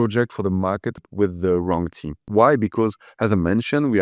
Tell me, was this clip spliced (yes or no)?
yes